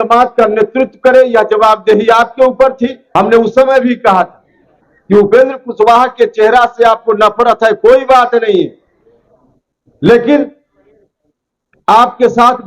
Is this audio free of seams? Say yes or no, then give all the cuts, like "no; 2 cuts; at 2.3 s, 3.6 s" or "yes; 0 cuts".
no; 1 cut; at 3.0 s